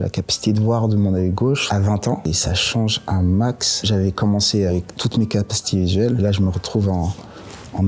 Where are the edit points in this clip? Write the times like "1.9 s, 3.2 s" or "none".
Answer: 2.3 s